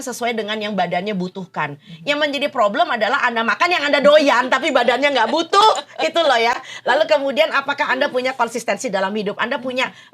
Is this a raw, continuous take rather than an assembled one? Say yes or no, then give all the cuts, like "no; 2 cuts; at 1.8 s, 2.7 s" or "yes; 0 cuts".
yes; 0 cuts